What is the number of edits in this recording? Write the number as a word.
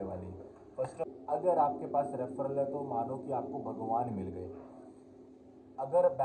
one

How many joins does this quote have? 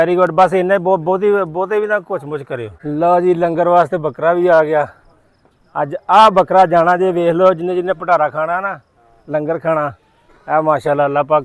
one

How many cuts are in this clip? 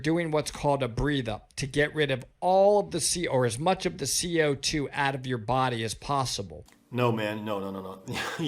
zero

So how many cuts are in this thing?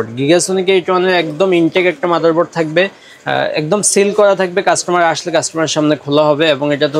zero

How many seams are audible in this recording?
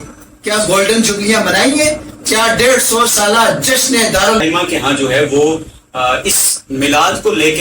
one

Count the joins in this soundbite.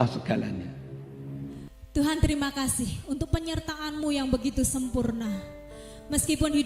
one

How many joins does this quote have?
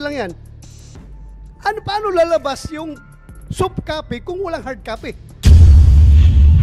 one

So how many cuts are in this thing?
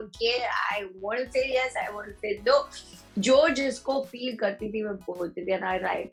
zero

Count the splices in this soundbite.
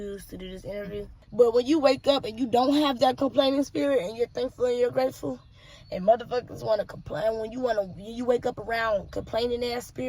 one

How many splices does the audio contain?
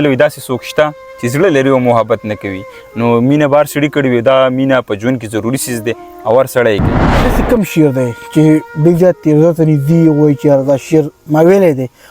one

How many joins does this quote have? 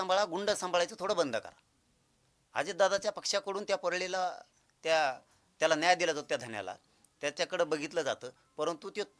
zero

